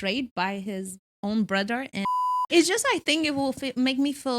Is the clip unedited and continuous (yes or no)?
no